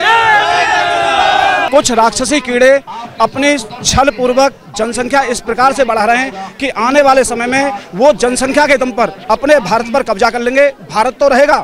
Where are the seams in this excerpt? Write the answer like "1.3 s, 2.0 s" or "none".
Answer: 1.7 s